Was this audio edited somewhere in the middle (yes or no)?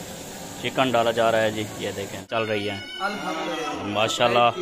yes